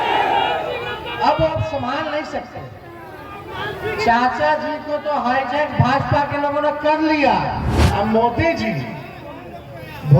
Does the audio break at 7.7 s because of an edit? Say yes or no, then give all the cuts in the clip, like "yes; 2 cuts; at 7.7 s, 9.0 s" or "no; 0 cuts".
yes; 1 cut; at 7.7 s